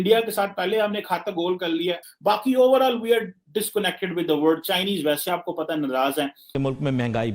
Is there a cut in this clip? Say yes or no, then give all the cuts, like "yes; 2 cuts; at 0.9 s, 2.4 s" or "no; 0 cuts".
yes; 2 cuts; at 2.0 s, 6.4 s